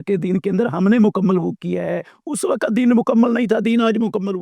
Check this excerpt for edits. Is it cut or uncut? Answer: uncut